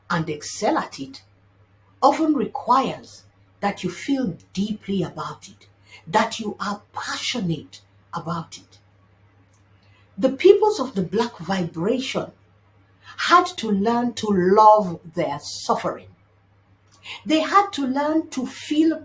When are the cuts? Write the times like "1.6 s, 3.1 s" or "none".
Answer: none